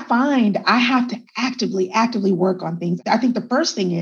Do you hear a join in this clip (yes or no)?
yes